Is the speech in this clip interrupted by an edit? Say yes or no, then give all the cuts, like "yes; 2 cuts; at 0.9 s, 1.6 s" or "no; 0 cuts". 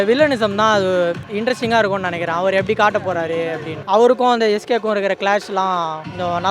no; 0 cuts